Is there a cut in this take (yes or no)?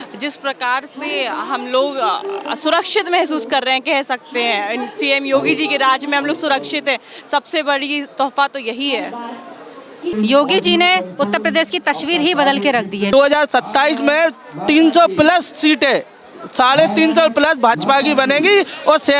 yes